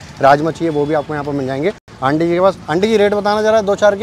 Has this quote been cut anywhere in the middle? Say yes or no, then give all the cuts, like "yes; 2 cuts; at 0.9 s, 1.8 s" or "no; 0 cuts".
no; 0 cuts